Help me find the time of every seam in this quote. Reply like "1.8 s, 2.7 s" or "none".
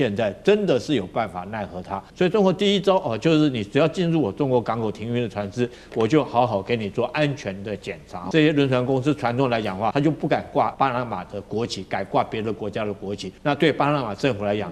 2.0 s, 8.2 s, 9.9 s, 10.7 s, 13.3 s